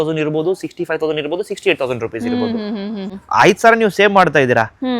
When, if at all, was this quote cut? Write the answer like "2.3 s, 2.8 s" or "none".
3.2 s